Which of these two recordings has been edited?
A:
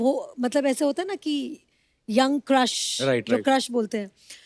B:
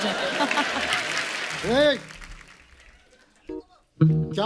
B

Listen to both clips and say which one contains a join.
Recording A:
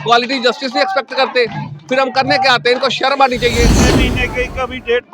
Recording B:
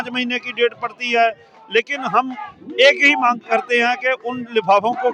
A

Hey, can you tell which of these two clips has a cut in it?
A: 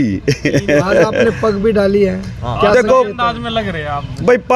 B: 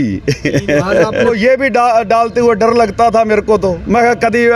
B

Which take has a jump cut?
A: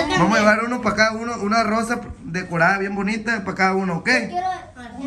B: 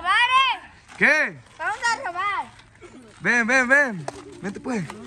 B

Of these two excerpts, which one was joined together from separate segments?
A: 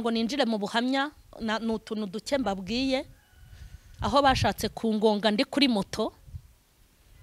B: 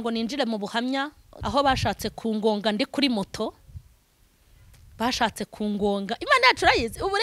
B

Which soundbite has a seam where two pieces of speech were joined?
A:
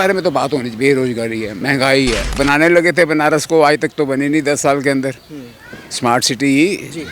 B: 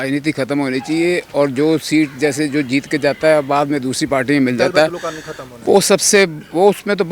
A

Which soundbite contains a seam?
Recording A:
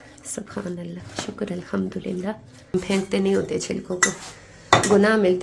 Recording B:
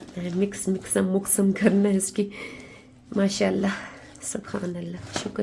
A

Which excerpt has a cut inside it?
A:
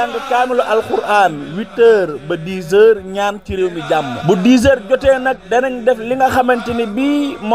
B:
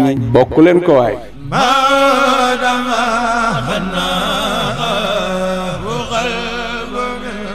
B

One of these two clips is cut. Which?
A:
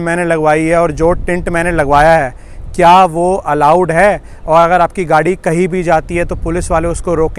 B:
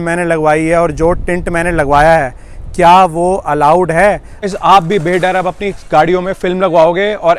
B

